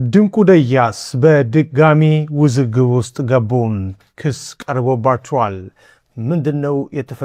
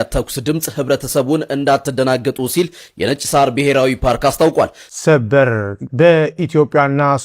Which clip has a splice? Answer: second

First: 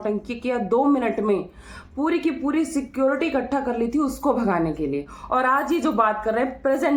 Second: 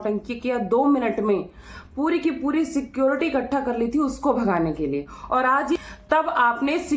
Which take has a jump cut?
second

